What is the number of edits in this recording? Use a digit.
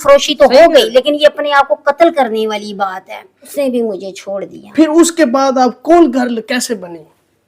1